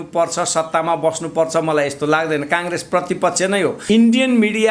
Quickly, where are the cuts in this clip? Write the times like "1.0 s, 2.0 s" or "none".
3.8 s